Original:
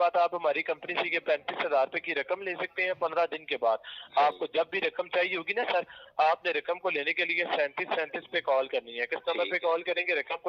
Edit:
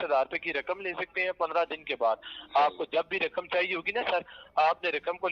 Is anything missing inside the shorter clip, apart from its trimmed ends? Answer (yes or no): no